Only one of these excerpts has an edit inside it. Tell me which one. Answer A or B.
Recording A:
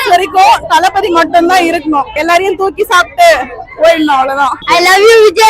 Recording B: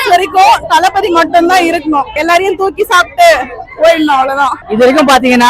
A